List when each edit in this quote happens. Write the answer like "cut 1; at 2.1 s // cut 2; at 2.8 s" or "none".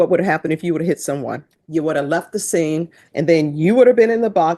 cut 1; at 1.5 s // cut 2; at 3.0 s